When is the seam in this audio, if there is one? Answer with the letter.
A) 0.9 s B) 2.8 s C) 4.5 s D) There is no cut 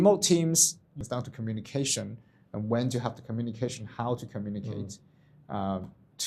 A